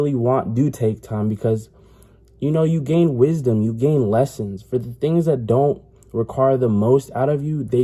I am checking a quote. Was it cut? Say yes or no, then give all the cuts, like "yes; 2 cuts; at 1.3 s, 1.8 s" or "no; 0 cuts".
no; 0 cuts